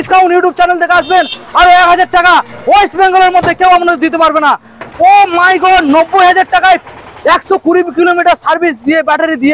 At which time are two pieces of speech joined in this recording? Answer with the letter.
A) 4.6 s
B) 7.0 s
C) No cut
A